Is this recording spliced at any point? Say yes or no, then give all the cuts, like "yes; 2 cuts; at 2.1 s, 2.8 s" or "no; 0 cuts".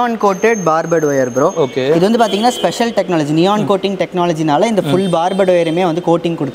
no; 0 cuts